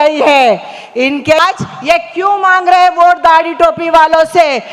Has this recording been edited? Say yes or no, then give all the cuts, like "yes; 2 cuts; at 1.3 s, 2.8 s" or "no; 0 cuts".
yes; 1 cut; at 1.4 s